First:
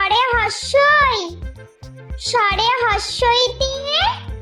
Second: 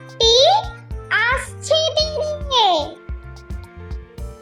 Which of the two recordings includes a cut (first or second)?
second